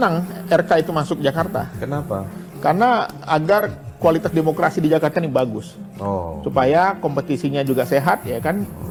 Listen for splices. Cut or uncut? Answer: uncut